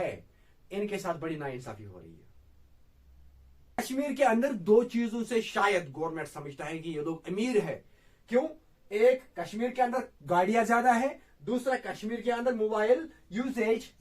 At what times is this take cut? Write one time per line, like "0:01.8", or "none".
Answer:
0:03.8